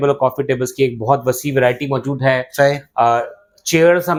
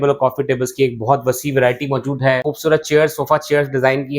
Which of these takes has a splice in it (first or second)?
second